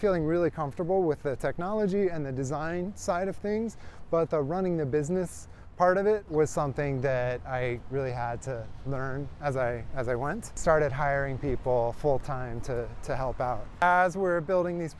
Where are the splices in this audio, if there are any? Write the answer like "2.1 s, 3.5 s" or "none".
10.5 s, 13.7 s